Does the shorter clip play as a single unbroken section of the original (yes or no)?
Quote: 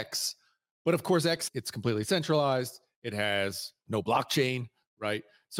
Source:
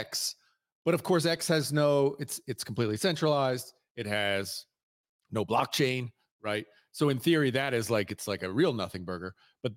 no